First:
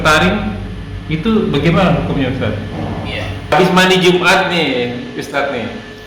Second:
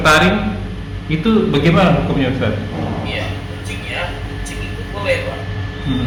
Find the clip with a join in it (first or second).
first